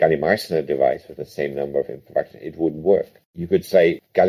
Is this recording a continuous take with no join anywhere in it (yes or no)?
yes